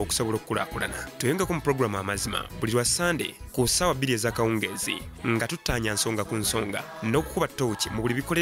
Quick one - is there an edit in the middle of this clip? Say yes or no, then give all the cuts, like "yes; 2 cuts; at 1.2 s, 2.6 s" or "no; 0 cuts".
yes; 1 cut; at 7.4 s